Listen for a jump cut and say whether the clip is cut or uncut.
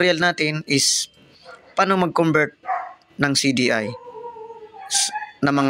uncut